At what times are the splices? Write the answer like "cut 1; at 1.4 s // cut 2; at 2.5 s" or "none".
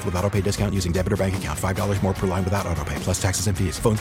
none